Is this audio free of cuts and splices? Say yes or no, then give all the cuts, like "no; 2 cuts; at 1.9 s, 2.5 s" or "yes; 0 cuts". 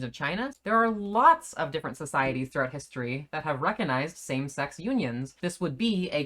no; 1 cut; at 5.4 s